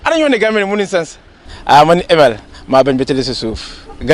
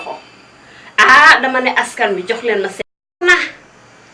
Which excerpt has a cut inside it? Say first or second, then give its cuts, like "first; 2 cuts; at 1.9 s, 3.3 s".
second; 1 cut; at 3.2 s